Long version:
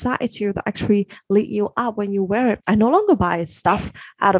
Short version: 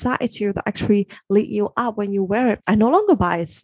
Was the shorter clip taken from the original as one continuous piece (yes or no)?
yes